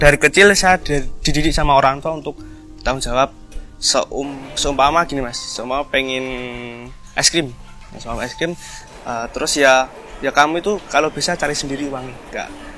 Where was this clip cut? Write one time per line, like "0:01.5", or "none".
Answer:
none